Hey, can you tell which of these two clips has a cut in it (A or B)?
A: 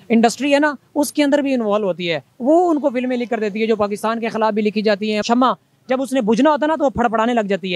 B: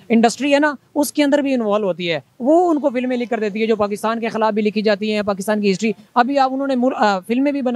A